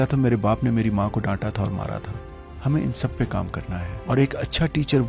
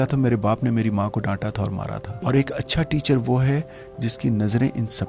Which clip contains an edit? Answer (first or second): second